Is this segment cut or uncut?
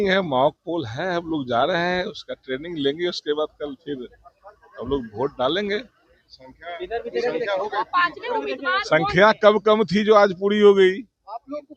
uncut